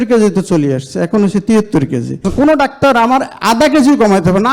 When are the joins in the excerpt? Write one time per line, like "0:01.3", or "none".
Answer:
0:02.3